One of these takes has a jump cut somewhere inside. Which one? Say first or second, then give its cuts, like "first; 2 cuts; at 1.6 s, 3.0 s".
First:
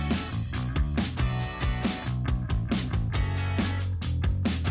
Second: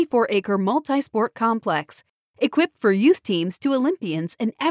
first; 1 cut; at 2.5 s